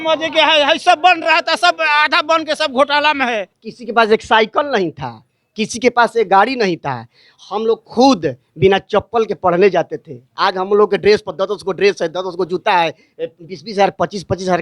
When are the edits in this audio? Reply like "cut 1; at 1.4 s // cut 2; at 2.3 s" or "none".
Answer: cut 1; at 3.5 s